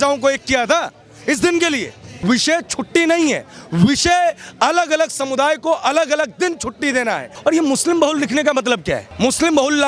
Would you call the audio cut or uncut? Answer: cut